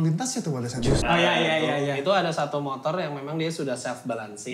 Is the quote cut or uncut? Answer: cut